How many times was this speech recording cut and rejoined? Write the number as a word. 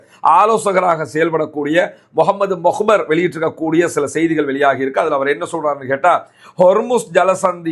zero